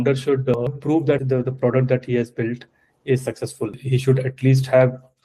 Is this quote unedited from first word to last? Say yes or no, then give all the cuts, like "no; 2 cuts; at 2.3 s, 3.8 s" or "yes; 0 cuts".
no; 2 cuts; at 1.0 s, 3.8 s